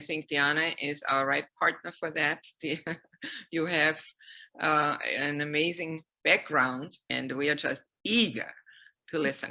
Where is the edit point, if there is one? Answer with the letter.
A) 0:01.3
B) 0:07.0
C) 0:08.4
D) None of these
B